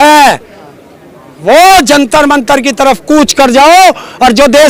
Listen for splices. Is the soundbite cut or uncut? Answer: uncut